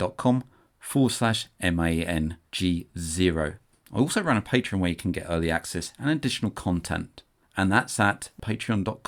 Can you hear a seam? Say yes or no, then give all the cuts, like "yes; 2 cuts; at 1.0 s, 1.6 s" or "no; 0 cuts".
no; 0 cuts